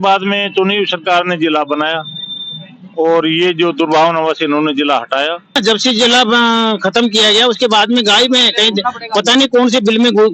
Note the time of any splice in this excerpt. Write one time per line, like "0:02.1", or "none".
0:05.6